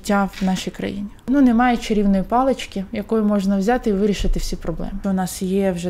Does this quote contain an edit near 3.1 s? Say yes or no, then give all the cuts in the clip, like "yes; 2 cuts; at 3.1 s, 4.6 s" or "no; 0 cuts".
no; 2 cuts; at 1.3 s, 5.0 s